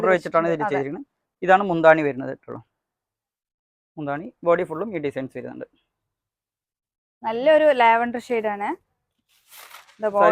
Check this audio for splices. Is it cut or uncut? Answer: uncut